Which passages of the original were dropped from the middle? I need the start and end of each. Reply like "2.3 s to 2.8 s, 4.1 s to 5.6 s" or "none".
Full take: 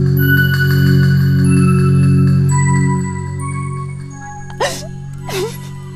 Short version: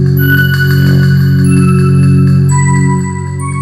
none